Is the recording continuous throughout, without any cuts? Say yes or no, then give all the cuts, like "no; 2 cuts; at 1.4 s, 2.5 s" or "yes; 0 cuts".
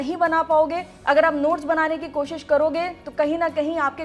yes; 0 cuts